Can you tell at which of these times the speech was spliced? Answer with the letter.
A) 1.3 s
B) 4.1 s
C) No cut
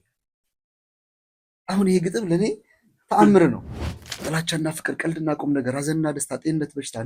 B